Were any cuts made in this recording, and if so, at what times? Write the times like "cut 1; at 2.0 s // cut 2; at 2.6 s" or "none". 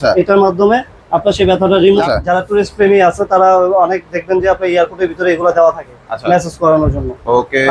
cut 1; at 2.0 s